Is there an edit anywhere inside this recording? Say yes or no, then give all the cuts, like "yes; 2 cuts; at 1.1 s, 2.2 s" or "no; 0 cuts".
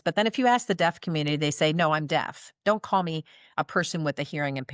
no; 0 cuts